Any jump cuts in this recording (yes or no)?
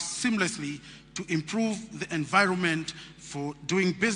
no